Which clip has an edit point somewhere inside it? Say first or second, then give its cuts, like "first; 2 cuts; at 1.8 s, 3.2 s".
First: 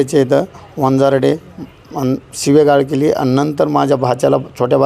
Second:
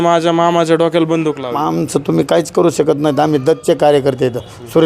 second; 1 cut; at 1.4 s